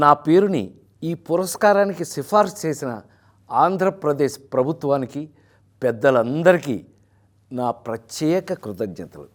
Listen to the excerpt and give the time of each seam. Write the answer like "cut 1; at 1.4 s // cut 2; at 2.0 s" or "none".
none